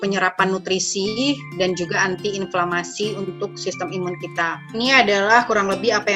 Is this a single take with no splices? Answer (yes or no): no